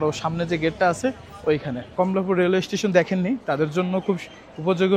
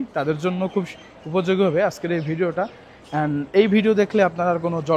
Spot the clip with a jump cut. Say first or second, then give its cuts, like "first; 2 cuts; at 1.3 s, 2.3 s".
first; 1 cut; at 1.9 s